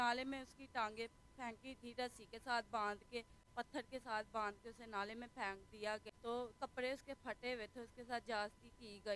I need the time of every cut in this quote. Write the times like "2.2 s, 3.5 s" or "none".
6.0 s